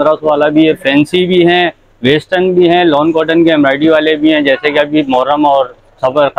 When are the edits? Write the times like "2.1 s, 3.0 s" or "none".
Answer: none